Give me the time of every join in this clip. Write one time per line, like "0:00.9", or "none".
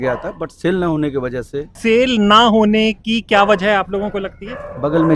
0:01.7